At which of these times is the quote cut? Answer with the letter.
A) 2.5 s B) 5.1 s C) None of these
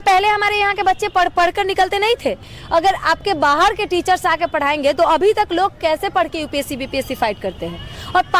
A